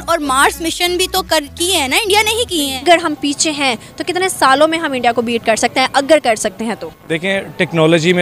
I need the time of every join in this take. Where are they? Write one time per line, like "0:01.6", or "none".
0:02.8